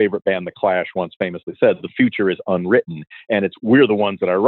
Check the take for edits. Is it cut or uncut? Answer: uncut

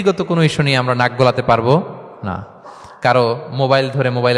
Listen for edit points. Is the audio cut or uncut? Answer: uncut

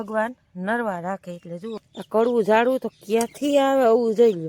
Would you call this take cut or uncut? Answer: cut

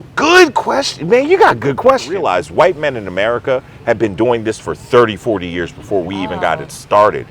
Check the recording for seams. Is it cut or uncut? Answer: cut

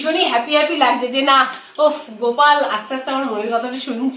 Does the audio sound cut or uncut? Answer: uncut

